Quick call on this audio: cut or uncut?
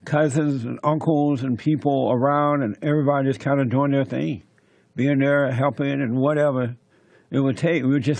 uncut